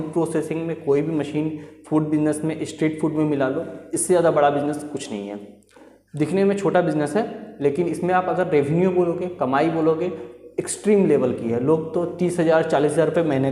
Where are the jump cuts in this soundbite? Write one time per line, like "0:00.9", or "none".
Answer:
none